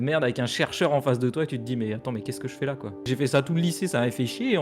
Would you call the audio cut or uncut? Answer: cut